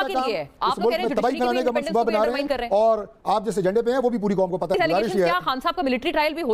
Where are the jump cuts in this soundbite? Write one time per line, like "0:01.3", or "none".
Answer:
0:04.7